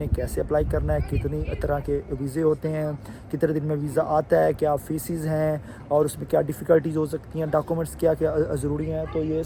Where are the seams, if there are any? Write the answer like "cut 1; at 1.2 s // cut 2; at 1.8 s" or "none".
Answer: none